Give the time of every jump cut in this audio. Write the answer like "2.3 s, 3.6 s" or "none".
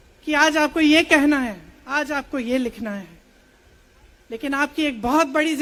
none